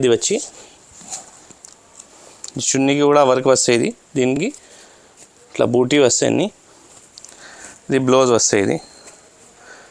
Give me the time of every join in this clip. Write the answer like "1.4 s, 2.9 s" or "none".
none

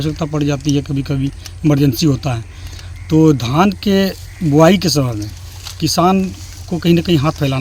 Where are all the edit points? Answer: none

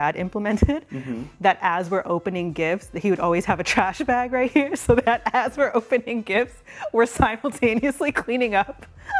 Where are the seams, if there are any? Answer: none

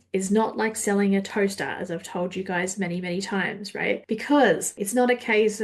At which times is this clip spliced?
4.0 s, 4.7 s

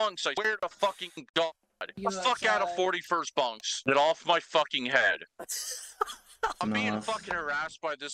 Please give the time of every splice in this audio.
2.0 s, 6.6 s

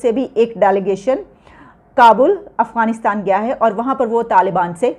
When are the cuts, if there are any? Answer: none

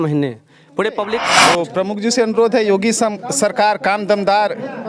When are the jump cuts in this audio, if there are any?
1.4 s

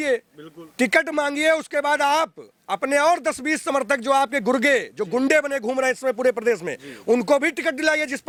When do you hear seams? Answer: none

